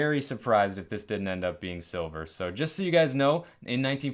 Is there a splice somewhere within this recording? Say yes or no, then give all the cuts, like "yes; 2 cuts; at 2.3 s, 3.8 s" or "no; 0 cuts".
no; 0 cuts